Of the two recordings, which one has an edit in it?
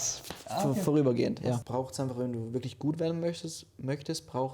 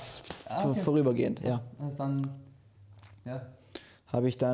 first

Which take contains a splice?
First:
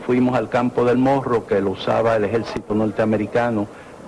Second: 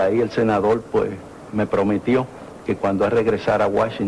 second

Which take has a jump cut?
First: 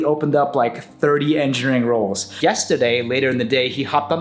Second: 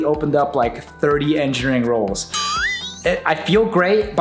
first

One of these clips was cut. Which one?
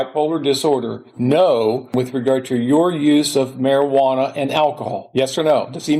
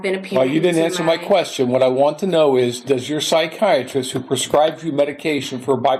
first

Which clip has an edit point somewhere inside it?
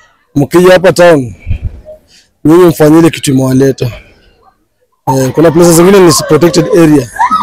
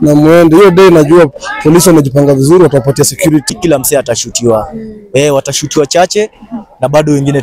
second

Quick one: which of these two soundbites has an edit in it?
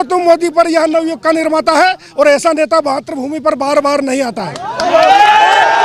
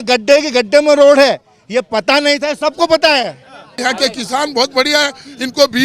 second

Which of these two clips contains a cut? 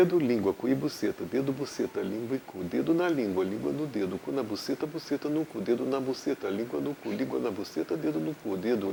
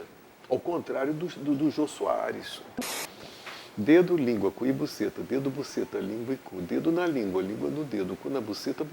second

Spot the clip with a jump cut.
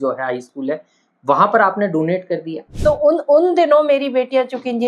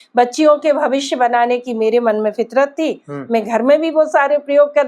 first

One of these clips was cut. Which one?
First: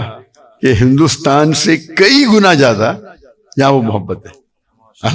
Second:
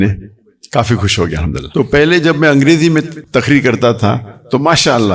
second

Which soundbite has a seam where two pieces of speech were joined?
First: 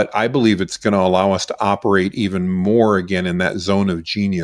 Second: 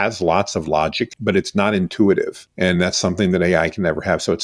second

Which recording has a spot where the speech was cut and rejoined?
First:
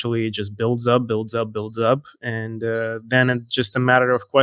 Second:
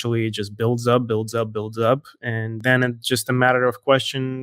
second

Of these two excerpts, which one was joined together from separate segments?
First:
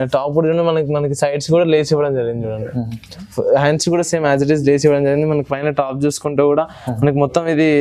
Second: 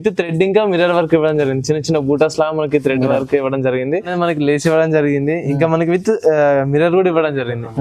second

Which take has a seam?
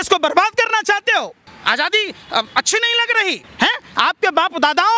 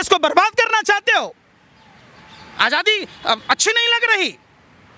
first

